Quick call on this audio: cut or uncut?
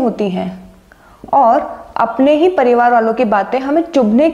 uncut